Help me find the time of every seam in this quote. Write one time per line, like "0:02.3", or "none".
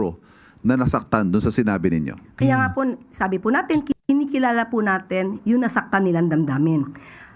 0:04.0